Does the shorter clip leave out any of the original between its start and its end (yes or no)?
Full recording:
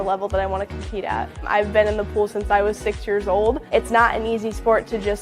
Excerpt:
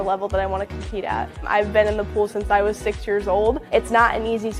no